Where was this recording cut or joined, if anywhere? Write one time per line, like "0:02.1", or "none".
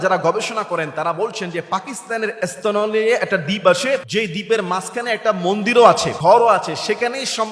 0:04.1
0:06.1